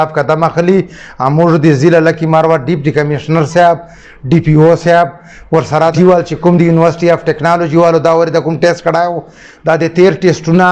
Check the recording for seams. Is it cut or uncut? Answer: cut